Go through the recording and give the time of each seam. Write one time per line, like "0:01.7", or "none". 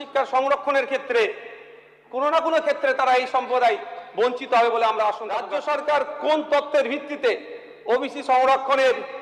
0:05.5